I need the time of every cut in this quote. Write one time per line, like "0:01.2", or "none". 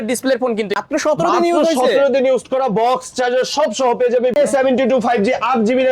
0:00.8
0:04.4